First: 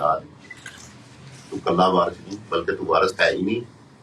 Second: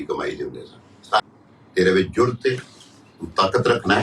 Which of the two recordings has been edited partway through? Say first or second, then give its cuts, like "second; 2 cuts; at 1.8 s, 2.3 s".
second; 1 cut; at 1.2 s